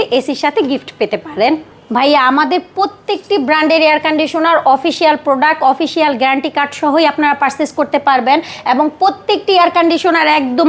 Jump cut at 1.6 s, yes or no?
yes